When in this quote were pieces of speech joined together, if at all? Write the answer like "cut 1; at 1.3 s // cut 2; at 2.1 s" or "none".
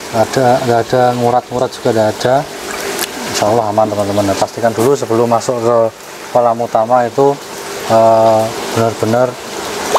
none